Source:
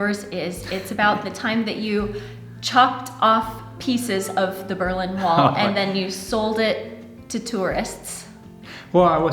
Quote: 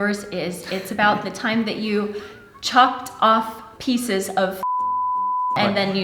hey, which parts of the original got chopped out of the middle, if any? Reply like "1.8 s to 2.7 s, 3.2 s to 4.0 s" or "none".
none